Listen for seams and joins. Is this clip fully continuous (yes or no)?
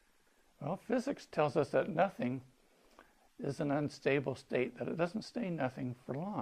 no